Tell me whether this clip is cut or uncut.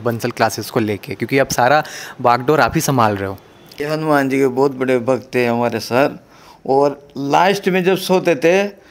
cut